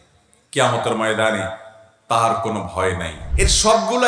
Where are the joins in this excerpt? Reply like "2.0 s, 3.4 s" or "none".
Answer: 3.2 s